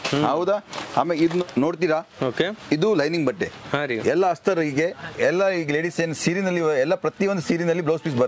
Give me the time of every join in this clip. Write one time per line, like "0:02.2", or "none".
0:01.4